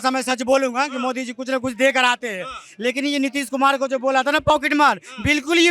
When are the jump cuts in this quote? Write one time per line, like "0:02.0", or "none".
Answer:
none